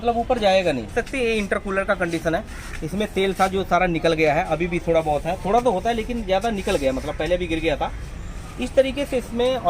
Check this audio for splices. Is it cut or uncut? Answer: cut